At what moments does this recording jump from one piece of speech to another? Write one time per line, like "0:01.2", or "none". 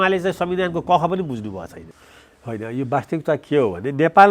0:01.9